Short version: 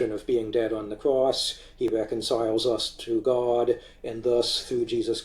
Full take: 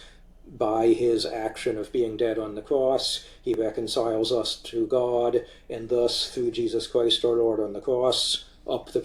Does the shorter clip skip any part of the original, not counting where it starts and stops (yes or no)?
no